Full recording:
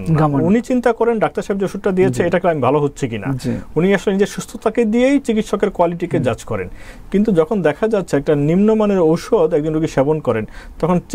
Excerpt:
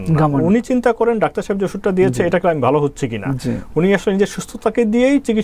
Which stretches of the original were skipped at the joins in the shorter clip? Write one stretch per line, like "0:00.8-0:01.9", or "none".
none